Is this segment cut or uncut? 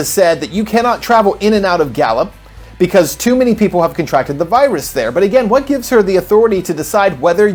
uncut